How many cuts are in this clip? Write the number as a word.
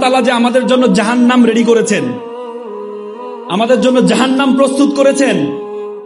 zero